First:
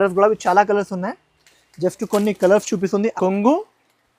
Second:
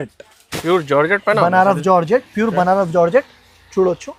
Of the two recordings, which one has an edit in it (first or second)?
first